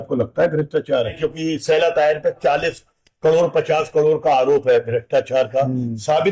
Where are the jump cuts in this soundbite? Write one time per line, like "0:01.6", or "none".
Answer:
0:01.2